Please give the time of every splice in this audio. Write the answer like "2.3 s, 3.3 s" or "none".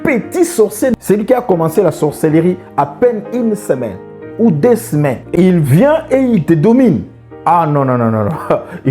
0.9 s